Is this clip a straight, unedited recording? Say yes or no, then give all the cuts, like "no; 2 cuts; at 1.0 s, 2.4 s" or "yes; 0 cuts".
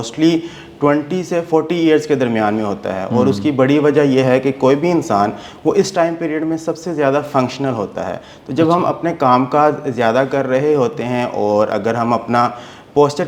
yes; 0 cuts